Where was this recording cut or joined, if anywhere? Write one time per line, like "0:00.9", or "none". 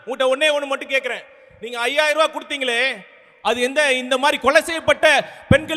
none